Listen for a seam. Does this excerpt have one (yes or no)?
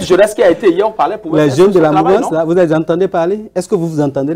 no